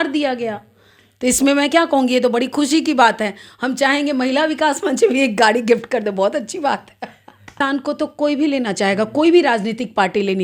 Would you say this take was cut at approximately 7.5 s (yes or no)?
yes